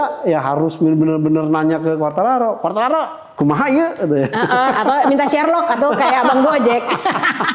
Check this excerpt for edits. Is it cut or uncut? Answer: uncut